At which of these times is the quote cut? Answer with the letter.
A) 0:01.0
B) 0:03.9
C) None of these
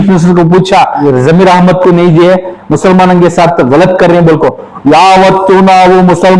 A